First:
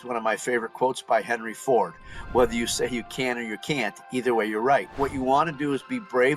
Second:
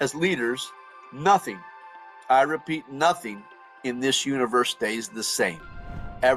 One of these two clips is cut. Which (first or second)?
first